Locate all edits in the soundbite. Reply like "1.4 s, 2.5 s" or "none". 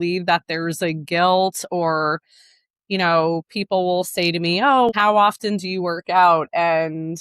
4.9 s